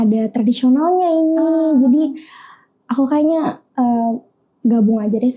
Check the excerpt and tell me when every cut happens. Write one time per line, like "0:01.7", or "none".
none

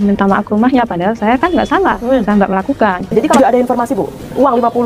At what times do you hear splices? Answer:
0:03.3

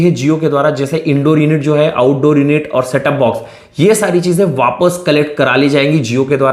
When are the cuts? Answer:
none

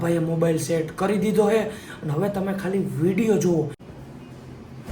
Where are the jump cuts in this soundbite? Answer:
0:03.8

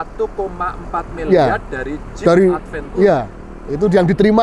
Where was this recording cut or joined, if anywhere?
none

